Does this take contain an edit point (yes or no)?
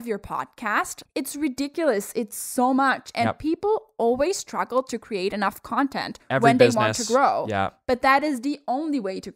yes